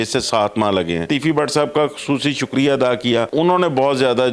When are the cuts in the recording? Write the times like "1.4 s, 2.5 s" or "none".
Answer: 1.1 s, 3.3 s